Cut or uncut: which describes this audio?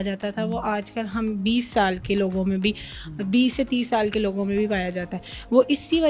uncut